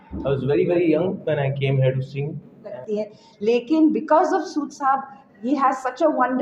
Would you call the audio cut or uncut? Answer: cut